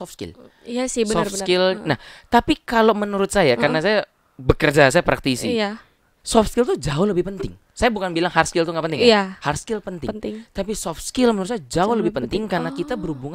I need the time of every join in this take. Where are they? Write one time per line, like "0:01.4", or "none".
none

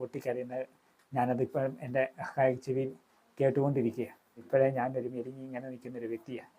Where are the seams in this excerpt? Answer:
0:04.5

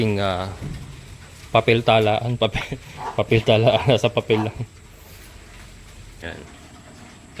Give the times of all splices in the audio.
0:06.2

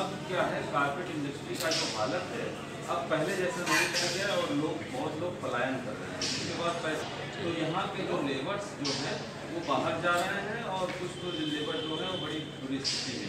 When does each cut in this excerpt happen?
none

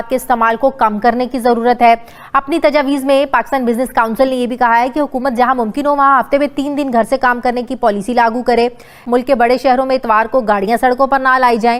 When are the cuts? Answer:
none

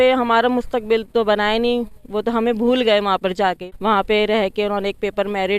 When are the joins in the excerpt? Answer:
0:01.1
0:03.6

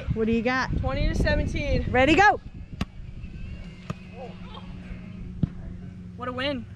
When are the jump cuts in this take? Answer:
none

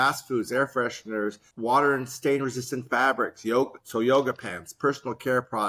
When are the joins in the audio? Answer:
0:01.5

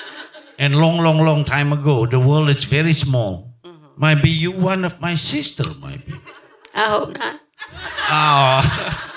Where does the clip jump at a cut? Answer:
none

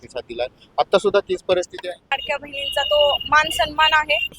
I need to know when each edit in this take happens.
0:02.2

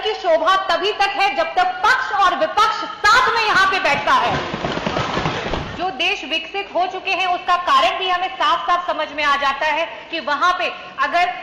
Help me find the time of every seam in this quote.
0:05.7

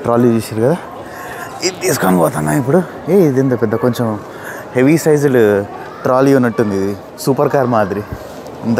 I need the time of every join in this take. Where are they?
none

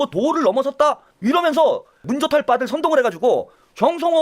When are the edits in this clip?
0:01.1
0:02.1

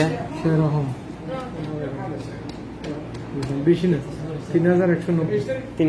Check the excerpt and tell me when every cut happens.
0:01.5

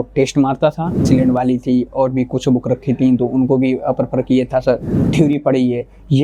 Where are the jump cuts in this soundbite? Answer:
0:01.0
0:05.0

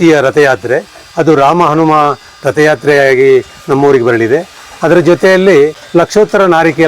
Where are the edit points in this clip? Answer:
0:05.8

